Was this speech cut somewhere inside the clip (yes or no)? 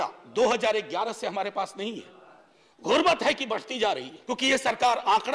yes